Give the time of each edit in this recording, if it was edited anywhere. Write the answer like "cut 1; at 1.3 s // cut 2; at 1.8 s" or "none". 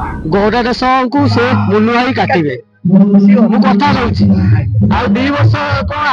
none